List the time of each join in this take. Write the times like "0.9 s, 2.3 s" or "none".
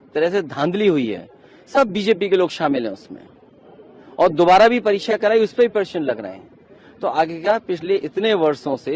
none

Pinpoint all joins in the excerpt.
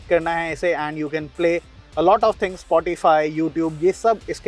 none

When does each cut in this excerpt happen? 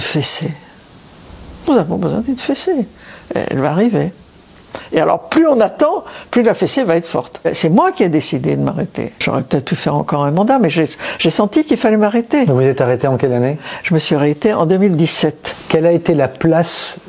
7.5 s, 9.2 s, 15.5 s

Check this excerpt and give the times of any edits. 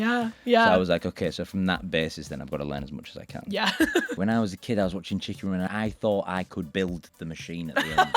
4.2 s, 5.7 s, 7.1 s

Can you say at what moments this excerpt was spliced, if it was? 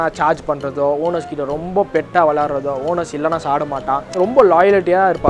4.1 s

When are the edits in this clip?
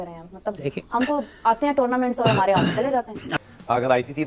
3.4 s

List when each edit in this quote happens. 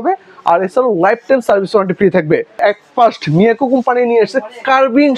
2.5 s

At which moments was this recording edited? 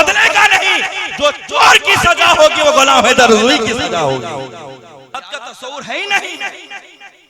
5.1 s

